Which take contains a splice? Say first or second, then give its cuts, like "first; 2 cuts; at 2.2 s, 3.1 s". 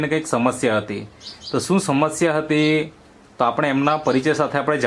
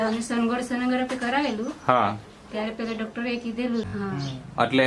second; 1 cut; at 3.9 s